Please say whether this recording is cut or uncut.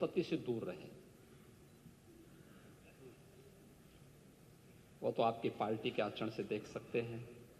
uncut